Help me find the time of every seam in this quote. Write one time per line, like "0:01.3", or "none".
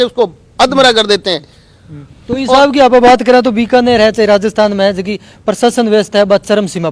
none